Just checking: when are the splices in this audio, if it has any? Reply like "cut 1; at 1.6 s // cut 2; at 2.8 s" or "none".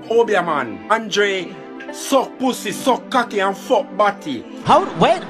cut 1; at 0.9 s